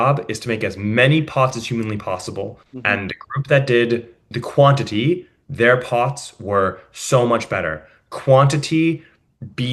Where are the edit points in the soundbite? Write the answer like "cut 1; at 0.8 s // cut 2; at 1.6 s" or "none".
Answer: cut 1; at 2.7 s // cut 2; at 4.3 s